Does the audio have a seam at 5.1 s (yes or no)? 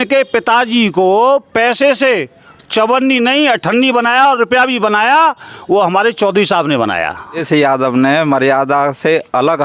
no